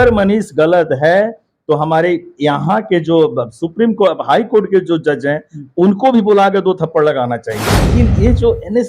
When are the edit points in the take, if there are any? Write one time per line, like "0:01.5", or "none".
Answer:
0:07.9